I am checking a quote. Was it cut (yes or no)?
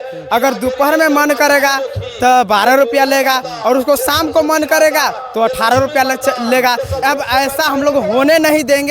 yes